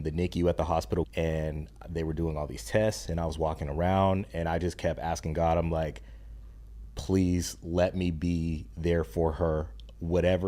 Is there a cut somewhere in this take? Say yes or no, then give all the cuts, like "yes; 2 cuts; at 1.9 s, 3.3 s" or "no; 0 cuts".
yes; 1 cut; at 1.1 s